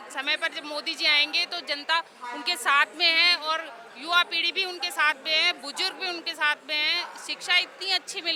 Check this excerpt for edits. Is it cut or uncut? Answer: uncut